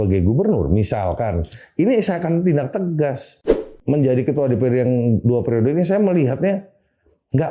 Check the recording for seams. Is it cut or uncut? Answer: cut